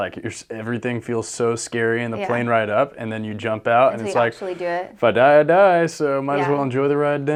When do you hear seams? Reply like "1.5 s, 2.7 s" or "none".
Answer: none